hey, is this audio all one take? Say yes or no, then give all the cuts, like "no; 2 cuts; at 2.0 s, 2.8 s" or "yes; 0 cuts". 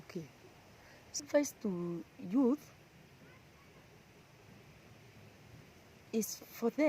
no; 1 cut; at 1.2 s